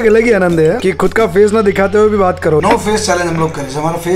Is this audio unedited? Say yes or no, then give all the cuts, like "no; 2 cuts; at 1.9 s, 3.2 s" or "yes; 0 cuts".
no; 1 cut; at 2.6 s